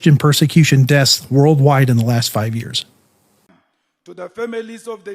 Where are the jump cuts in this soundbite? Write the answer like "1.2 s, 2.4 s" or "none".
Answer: 3.5 s